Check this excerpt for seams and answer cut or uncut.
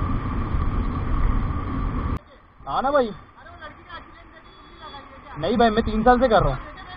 cut